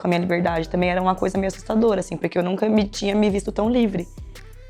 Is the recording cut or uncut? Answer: uncut